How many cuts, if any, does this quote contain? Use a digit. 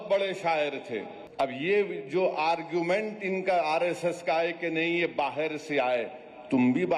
1